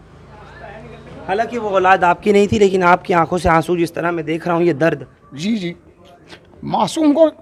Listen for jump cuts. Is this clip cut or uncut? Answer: uncut